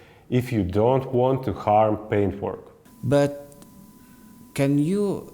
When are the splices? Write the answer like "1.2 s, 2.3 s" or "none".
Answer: 2.7 s